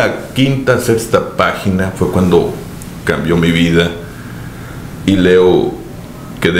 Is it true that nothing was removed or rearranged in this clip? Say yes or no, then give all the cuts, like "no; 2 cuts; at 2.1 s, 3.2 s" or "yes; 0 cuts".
yes; 0 cuts